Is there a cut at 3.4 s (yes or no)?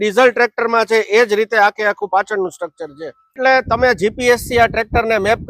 yes